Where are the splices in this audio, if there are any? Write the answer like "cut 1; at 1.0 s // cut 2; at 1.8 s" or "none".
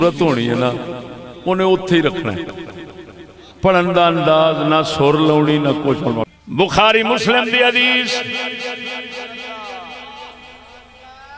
cut 1; at 6.2 s